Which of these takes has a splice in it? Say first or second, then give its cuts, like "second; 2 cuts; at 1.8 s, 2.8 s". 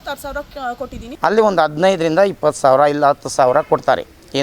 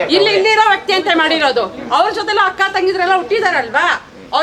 first; 1 cut; at 1.0 s